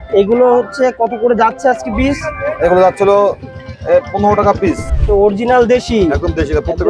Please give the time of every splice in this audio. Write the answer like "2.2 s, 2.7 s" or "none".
4.9 s